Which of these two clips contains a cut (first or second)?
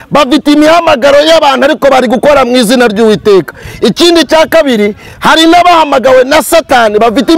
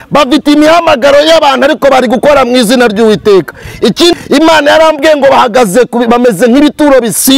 second